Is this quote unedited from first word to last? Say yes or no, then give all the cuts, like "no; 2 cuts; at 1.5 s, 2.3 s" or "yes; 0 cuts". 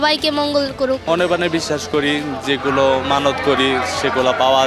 no; 1 cut; at 1.0 s